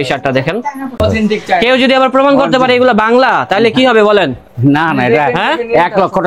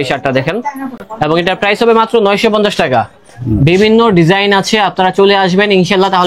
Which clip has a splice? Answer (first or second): first